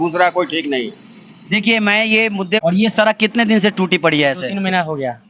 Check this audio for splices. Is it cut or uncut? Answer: cut